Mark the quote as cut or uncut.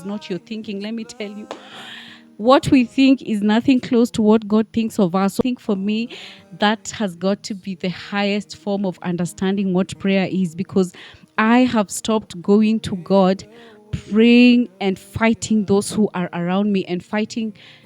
cut